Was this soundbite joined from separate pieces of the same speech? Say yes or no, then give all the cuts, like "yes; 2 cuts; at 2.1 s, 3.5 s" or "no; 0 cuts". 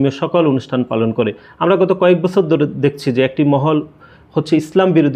no; 0 cuts